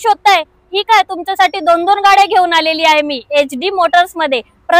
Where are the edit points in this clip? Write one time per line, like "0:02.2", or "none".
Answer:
none